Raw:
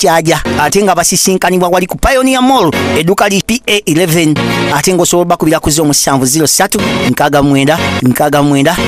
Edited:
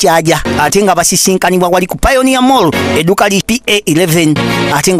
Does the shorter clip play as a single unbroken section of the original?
yes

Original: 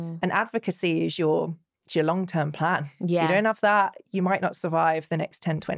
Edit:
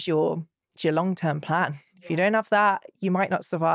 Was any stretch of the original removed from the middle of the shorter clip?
no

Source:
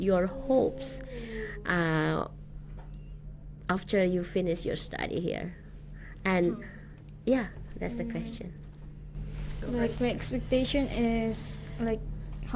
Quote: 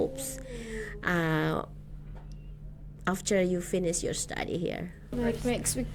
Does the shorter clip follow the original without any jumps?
no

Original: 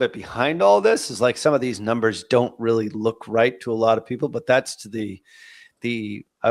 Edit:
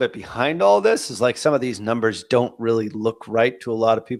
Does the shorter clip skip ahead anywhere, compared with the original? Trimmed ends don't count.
no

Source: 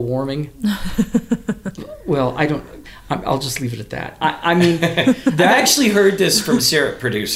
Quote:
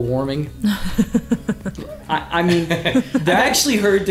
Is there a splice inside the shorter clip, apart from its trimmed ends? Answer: yes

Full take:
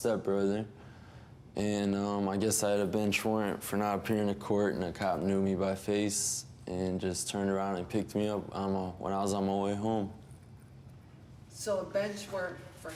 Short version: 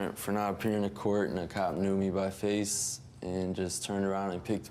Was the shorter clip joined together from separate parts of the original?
no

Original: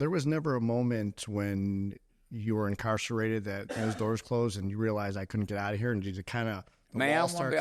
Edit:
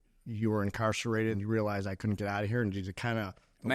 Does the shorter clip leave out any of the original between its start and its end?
yes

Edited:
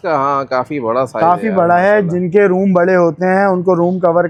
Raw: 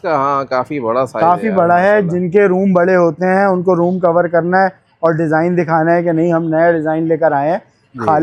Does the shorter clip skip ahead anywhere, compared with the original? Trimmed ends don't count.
no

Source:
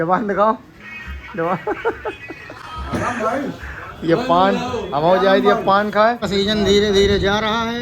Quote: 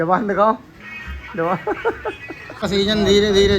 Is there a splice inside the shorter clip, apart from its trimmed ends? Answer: yes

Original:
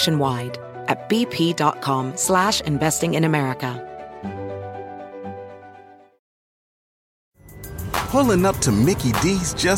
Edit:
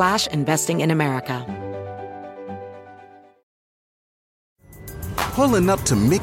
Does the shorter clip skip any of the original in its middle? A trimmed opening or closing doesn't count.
yes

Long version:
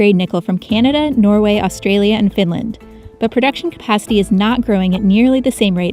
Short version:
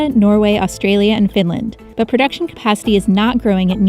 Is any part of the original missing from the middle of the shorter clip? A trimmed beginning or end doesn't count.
yes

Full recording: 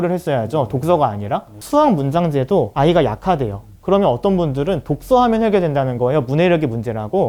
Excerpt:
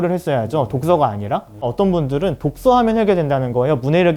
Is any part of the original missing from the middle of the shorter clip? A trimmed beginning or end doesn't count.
yes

